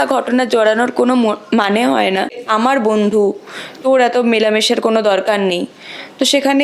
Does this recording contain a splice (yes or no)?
yes